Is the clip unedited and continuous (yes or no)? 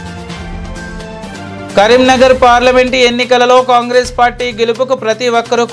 yes